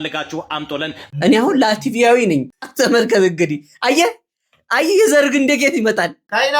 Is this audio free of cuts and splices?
no; 2 cuts; at 1.0 s, 2.6 s

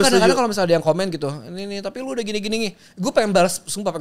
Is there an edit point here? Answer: no; 0 cuts

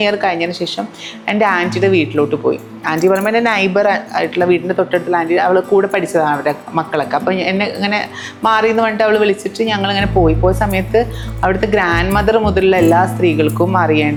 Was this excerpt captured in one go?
yes; 0 cuts

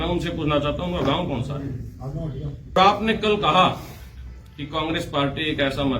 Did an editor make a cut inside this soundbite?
yes; 1 cut; at 2.8 s

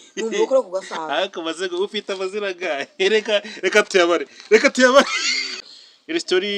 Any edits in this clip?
yes; 1 cut; at 5.6 s

